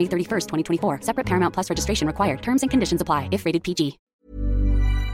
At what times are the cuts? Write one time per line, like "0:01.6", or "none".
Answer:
0:04.1